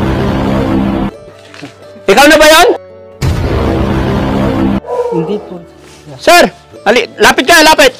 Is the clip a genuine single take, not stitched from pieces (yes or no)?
yes